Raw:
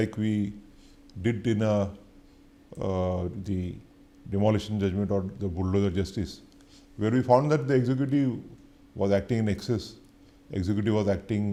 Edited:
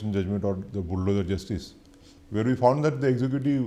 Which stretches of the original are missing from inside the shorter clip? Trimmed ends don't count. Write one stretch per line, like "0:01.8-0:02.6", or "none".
none